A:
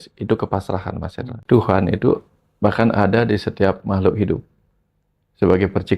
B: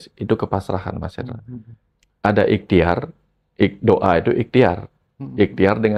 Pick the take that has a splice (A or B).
A